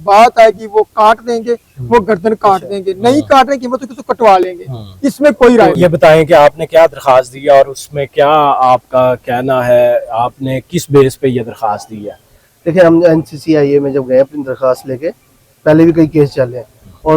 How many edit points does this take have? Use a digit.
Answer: 0